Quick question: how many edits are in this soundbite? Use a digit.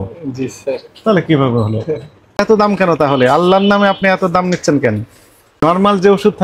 2